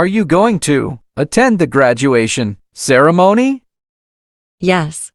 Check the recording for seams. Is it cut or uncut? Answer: uncut